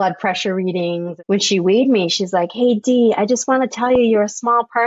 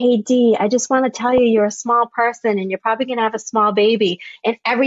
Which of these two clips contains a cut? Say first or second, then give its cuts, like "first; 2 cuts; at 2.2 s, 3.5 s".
first; 1 cut; at 1.1 s